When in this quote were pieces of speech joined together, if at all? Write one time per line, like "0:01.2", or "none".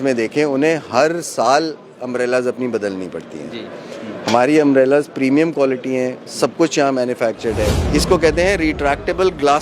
0:07.8